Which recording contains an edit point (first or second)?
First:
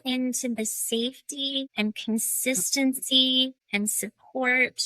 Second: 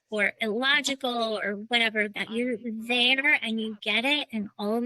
first